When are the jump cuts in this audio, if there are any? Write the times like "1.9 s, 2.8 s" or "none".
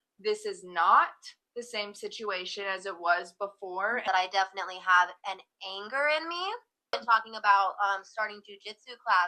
4.0 s, 7.0 s